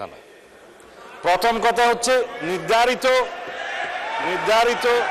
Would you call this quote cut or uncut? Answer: uncut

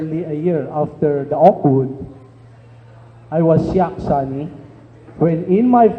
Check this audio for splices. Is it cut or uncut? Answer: cut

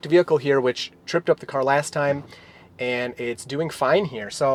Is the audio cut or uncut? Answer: uncut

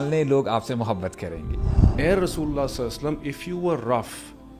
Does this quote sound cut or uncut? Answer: cut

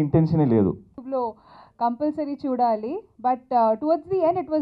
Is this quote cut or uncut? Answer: cut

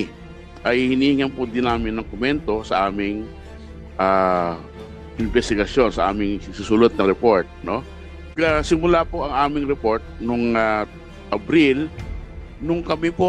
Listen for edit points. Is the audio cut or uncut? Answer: cut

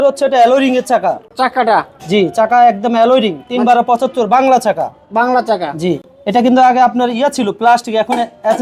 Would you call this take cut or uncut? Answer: uncut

